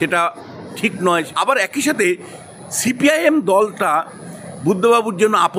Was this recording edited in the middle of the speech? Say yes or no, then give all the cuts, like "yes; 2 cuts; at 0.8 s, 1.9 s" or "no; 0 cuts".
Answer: yes; 1 cut; at 1.3 s